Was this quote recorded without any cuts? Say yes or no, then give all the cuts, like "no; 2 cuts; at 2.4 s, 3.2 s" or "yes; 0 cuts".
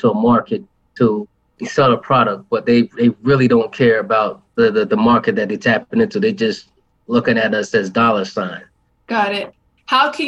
no; 1 cut; at 9.0 s